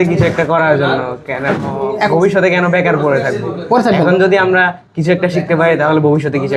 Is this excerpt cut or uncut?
uncut